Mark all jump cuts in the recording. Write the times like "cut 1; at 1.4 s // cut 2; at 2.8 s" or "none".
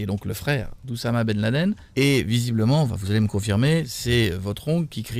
cut 1; at 1.8 s